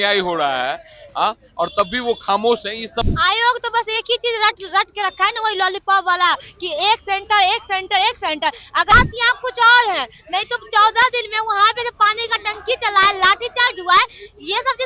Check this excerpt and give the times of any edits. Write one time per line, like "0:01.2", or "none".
0:03.0
0:08.9

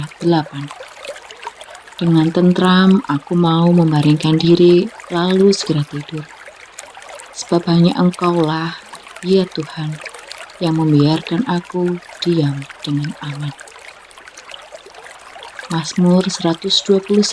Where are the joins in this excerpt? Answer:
0:13.6
0:15.7

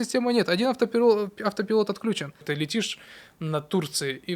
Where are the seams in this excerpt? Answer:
0:02.4

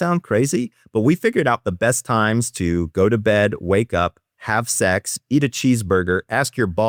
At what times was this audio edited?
none

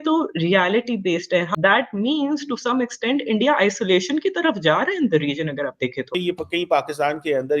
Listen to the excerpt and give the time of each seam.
0:01.5
0:06.1

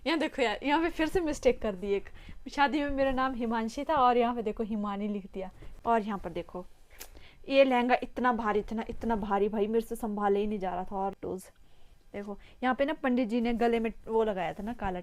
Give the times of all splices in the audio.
0:05.6
0:11.1

